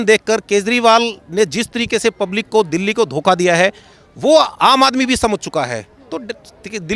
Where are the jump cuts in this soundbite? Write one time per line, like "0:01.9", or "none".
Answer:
none